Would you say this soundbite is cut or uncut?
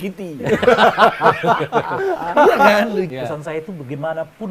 cut